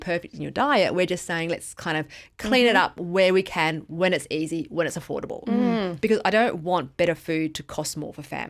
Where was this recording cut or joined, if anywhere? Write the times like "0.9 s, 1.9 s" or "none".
none